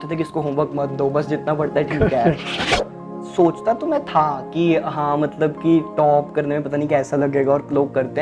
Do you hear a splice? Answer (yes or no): yes